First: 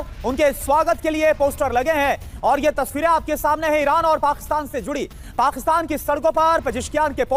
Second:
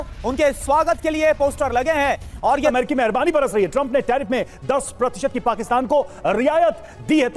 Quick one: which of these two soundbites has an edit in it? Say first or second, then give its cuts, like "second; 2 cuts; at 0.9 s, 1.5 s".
second; 1 cut; at 2.7 s